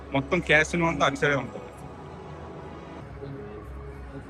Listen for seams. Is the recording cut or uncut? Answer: cut